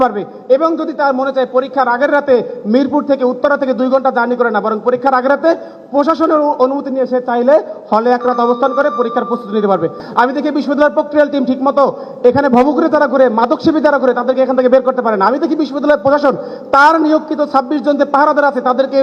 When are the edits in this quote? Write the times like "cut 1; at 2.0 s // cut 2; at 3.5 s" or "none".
cut 1; at 10.0 s